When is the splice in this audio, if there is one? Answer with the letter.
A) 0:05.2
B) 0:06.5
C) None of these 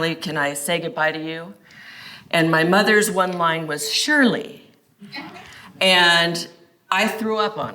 A